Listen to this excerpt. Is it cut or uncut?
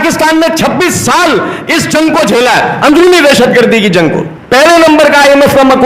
cut